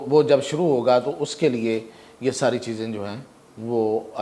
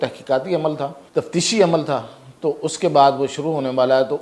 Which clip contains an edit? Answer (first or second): second